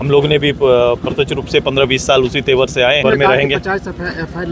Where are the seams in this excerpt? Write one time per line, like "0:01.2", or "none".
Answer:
0:03.0